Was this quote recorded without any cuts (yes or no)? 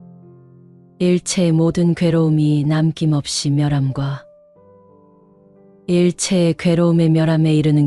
yes